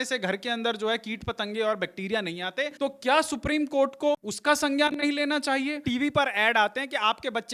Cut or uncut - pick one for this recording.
cut